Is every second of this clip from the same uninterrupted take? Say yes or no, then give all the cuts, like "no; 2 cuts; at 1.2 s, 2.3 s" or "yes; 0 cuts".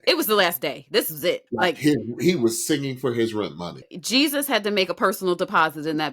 no; 1 cut; at 4.0 s